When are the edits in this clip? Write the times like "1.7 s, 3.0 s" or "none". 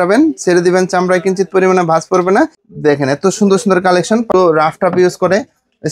2.6 s, 4.3 s